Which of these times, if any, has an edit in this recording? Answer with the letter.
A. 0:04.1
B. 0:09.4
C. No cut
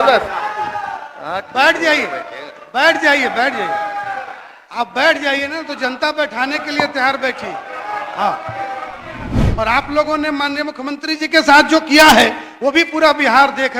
B